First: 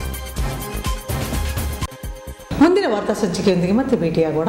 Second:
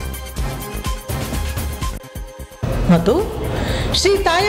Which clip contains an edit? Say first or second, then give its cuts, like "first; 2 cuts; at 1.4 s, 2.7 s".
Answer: second; 1 cut; at 1.8 s